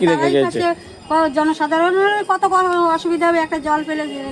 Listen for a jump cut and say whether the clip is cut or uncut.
uncut